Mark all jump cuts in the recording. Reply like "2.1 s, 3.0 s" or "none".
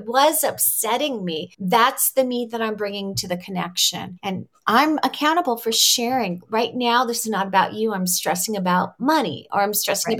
1.5 s, 4.1 s